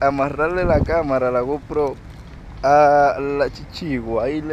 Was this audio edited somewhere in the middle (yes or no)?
no